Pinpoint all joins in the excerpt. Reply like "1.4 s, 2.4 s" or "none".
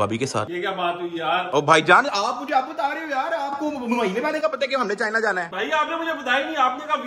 none